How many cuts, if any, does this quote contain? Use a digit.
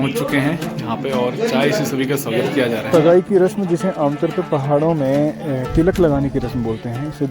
1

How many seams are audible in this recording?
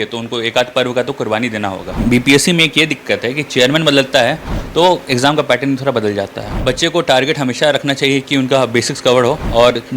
2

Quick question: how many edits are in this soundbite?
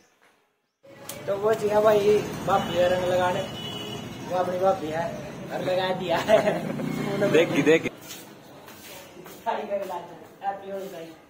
2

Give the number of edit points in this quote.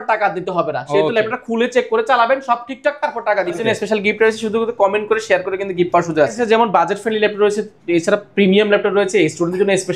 2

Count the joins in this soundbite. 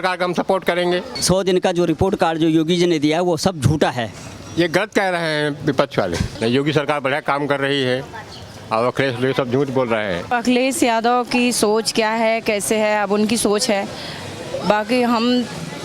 3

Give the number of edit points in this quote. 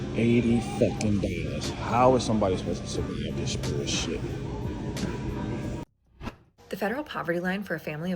1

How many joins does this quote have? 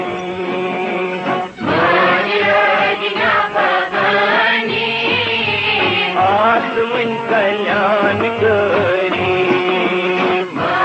1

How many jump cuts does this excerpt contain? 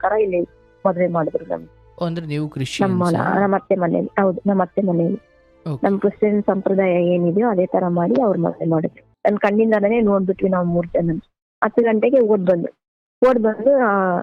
1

